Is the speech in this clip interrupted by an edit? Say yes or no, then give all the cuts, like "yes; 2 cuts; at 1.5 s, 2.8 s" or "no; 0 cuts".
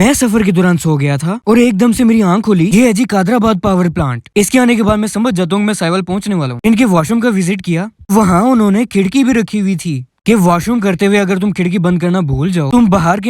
yes; 1 cut; at 2.7 s